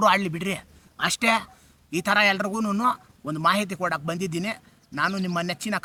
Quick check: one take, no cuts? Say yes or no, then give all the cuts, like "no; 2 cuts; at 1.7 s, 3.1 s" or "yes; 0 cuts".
yes; 0 cuts